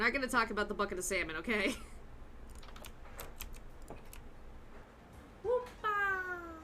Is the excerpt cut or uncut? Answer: uncut